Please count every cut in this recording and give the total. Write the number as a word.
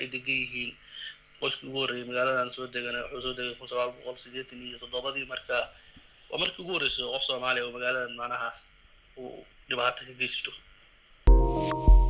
one